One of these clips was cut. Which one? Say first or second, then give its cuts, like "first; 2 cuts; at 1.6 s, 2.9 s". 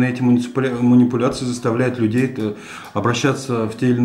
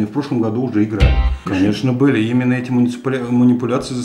second; 1 cut; at 1.4 s